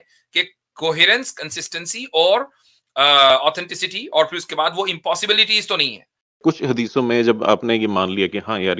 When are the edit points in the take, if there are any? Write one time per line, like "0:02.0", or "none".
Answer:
0:06.4

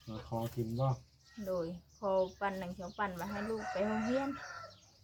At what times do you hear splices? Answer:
none

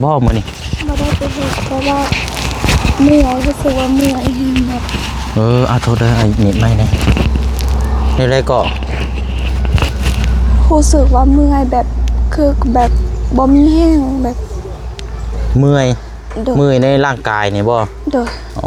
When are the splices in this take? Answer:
none

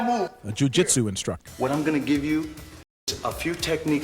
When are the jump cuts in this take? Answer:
0:01.4
0:03.1

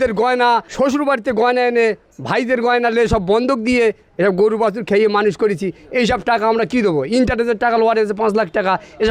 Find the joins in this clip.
none

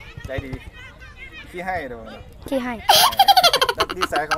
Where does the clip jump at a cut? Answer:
none

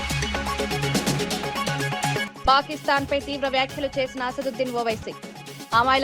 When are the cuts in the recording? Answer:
0:02.2

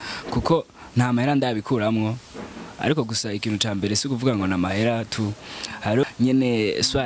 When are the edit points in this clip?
0:06.0

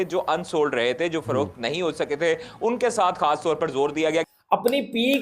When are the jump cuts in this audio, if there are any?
0:04.3

